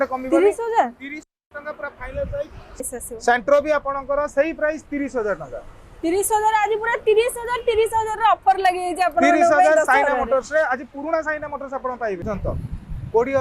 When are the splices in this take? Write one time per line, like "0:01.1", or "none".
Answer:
0:02.8
0:12.2